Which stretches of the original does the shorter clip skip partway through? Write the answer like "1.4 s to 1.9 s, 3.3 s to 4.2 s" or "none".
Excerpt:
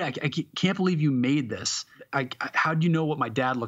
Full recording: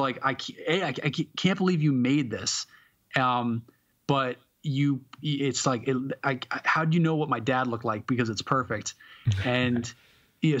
2.8 s to 6.1 s

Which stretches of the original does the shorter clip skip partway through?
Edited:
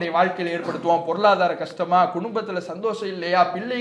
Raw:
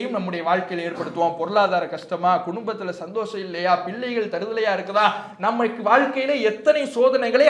none

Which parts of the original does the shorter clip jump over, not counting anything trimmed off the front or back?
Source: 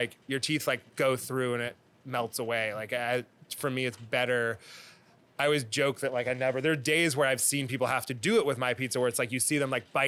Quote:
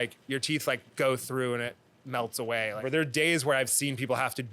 2.8 s to 6.6 s

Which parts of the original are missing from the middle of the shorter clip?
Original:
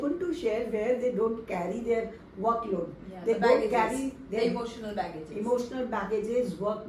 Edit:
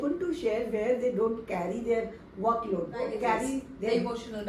3.1 s to 3.6 s

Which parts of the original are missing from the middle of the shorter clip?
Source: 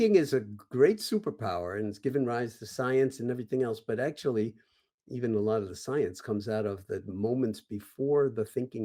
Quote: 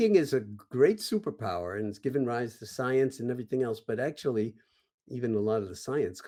none

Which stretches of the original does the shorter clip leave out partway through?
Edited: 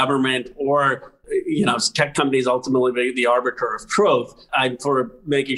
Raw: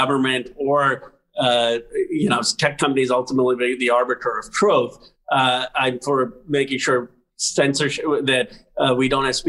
1.2 s to 1.9 s, 5.1 s to 5.7 s

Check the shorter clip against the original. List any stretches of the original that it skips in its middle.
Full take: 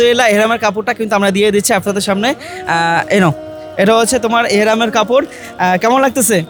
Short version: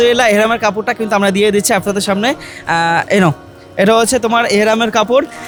none

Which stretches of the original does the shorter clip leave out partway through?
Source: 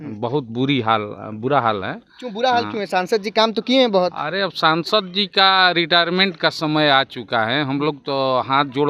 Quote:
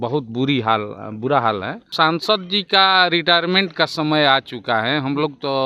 2.1 s to 4.5 s

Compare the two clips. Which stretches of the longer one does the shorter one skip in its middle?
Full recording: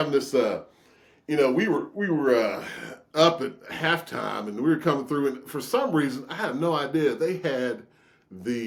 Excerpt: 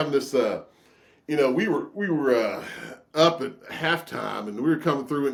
none

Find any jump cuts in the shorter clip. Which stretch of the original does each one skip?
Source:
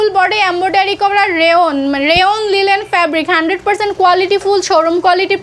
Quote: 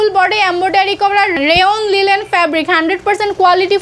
1.4 s to 2.0 s

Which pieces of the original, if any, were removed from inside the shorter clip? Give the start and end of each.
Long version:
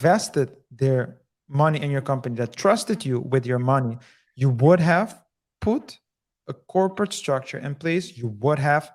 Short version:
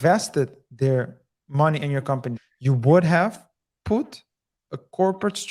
2.3 s to 4.0 s

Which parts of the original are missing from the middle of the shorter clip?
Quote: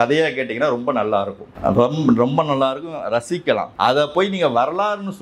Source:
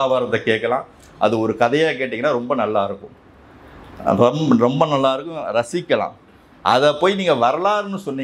3.1 s to 3.9 s, 6.1 s to 6.6 s

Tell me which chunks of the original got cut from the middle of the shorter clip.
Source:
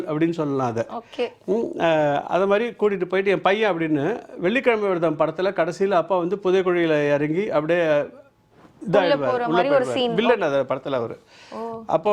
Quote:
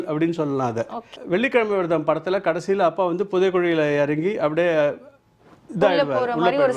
1.1 s to 4.2 s

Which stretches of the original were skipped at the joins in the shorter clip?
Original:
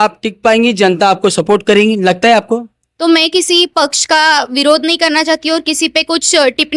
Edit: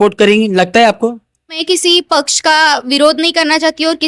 3.0 s to 3.2 s

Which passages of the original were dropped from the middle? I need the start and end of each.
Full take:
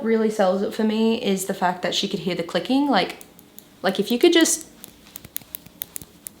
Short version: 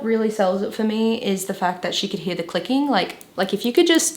3.2 s to 3.7 s

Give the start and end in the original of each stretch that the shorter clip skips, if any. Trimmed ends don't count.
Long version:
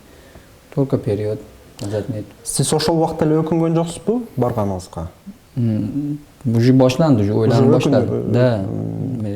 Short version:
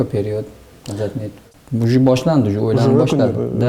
2.4 s to 6.2 s

